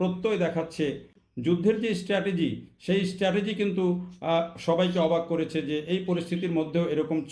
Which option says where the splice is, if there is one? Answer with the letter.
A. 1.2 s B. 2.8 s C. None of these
A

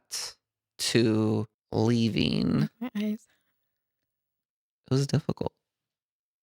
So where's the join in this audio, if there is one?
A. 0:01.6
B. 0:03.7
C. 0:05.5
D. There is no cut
A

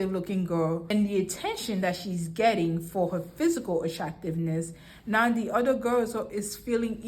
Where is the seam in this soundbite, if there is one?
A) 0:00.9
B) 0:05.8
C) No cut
A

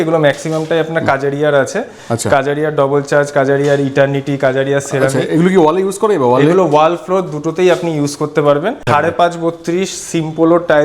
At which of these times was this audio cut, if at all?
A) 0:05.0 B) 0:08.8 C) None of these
B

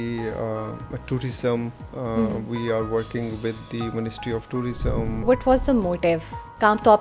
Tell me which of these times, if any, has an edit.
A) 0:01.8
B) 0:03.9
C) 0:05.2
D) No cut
C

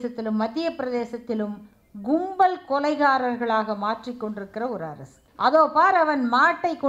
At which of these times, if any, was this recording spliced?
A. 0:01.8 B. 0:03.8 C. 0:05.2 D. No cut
C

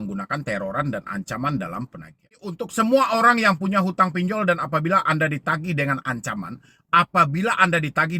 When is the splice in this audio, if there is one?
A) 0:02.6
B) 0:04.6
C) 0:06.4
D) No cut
A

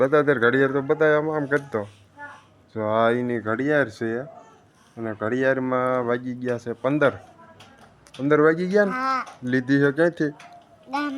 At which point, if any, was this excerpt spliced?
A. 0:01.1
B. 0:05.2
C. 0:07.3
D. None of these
D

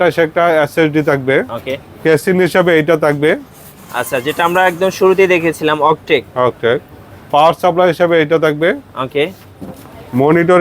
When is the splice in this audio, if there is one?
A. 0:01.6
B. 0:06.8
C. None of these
A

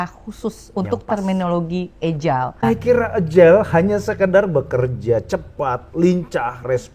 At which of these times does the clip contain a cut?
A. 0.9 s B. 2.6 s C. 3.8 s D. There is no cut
B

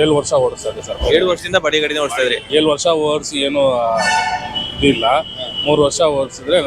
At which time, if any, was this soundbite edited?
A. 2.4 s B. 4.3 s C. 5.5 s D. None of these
A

